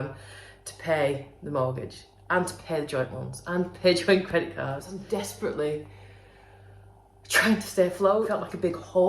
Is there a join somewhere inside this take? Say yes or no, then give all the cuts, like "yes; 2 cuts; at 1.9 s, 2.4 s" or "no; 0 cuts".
yes; 2 cuts; at 4.9 s, 8.3 s